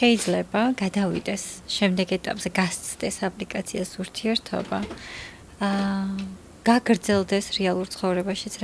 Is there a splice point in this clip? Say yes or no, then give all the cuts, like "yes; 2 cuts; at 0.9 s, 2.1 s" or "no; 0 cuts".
no; 0 cuts